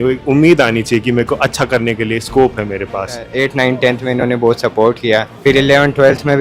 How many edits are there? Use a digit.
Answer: 2